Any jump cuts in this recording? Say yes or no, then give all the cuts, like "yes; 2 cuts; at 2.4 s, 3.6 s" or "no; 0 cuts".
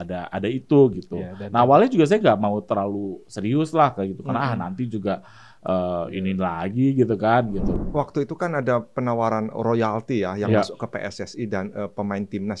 yes; 1 cut; at 7.8 s